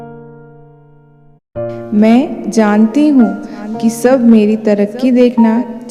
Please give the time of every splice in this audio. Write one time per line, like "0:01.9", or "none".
0:01.9